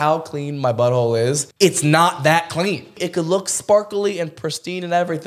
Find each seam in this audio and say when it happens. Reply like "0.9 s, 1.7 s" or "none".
1.5 s, 3.0 s